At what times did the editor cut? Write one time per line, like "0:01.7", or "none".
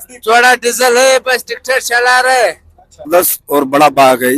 0:03.1